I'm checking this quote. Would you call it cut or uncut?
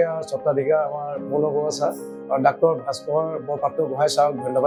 uncut